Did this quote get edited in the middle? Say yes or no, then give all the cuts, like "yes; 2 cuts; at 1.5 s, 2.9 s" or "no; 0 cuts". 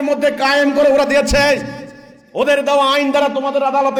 no; 0 cuts